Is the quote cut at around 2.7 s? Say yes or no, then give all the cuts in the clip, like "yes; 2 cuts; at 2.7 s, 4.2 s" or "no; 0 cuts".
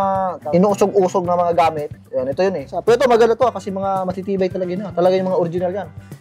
yes; 1 cut; at 2.7 s